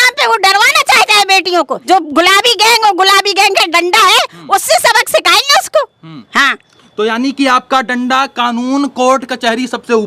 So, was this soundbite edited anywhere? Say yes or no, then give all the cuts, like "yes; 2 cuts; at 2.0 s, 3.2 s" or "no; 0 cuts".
yes; 1 cut; at 1.8 s